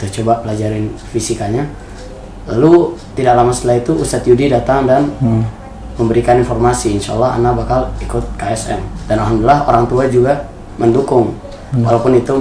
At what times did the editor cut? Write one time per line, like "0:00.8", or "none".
none